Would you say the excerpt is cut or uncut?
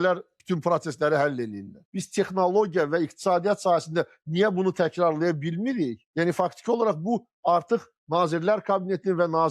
cut